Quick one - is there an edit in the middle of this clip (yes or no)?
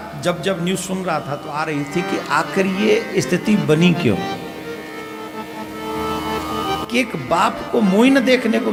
no